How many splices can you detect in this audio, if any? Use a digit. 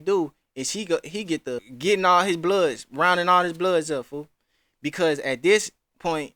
1